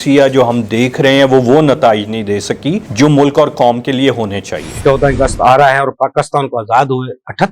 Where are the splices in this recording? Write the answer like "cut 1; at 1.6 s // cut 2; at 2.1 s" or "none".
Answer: cut 1; at 4.7 s